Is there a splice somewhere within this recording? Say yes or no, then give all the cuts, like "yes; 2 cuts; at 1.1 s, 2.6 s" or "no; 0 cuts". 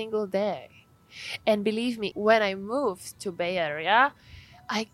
yes; 1 cut; at 2.1 s